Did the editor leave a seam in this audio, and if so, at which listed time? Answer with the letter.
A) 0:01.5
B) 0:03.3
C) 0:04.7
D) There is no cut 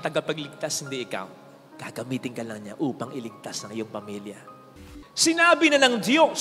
C